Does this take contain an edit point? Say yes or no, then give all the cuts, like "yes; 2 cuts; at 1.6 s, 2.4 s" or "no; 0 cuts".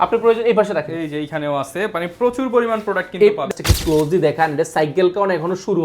yes; 1 cut; at 3.5 s